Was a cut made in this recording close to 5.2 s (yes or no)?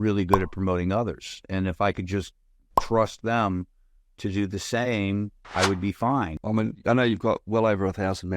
no